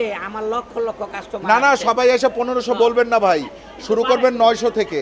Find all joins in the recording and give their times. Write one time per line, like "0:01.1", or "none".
none